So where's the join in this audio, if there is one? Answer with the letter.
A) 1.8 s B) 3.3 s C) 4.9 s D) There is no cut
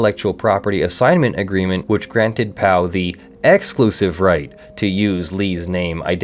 A